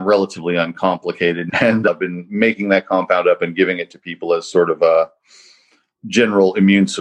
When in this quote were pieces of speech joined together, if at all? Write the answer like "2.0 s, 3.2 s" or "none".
1.4 s